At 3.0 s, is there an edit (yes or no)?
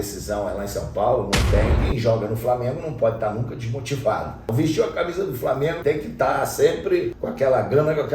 no